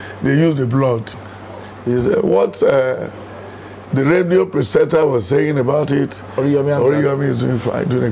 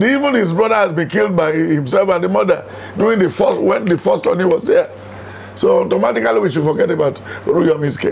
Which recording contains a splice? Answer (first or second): first